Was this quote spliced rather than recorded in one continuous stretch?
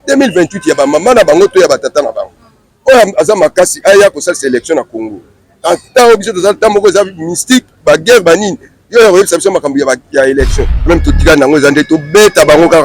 yes; 1 cut; at 10.9 s

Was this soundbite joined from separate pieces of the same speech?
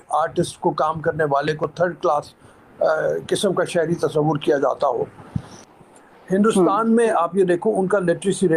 yes; 1 cut; at 5.6 s

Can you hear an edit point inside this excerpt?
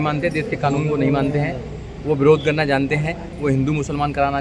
no; 0 cuts

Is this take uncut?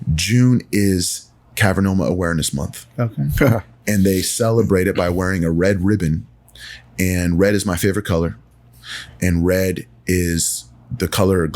yes; 0 cuts

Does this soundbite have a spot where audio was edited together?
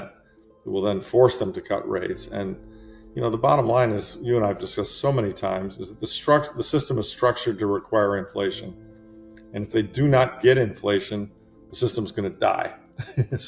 no; 0 cuts

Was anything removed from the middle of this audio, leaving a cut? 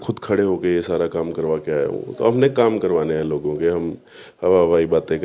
no; 0 cuts

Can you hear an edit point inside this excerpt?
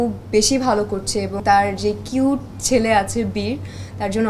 yes; 1 cut; at 1.4 s

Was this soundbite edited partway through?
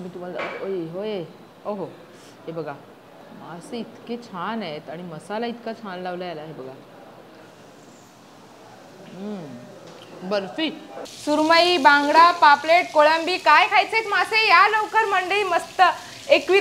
yes; 2 cuts; at 3.2 s, 11.2 s

